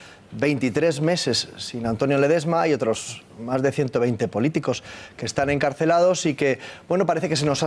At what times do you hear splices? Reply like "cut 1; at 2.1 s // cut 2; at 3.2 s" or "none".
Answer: cut 1; at 4.0 s